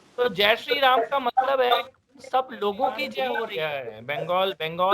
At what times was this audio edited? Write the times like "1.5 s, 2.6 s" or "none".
3.5 s